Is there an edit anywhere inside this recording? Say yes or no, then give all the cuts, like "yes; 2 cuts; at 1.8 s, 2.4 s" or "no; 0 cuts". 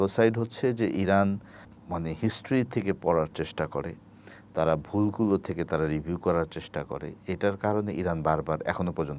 no; 0 cuts